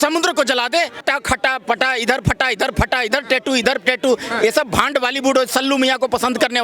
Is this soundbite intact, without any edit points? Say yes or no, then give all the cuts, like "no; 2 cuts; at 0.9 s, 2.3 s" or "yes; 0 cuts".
no; 1 cut; at 1.0 s